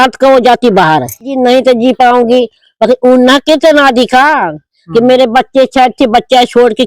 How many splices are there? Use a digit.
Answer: 1